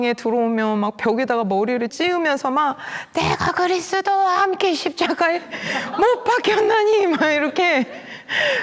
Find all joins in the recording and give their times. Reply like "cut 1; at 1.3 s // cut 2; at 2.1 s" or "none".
cut 1; at 1.9 s